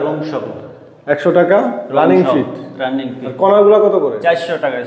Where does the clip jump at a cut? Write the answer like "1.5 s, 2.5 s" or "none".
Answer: none